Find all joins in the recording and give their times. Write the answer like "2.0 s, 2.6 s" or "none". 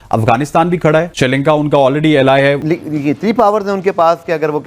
1.1 s, 2.6 s